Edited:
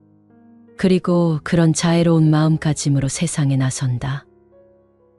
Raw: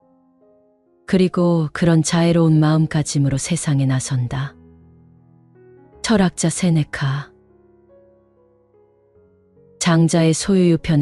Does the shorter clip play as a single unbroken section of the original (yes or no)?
no